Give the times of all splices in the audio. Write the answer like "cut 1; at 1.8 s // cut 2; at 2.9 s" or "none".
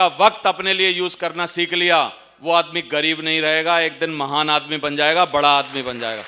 none